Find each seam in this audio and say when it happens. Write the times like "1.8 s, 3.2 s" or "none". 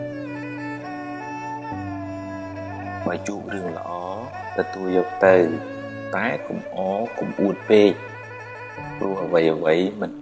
none